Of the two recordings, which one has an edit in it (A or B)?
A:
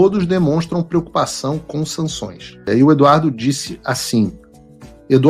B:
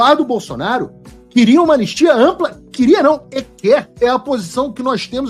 A